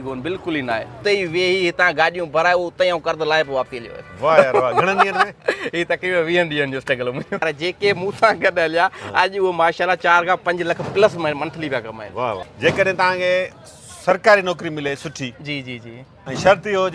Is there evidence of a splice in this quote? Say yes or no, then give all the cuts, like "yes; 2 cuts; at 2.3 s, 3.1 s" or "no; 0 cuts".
yes; 3 cuts; at 1.0 s, 7.4 s, 12.4 s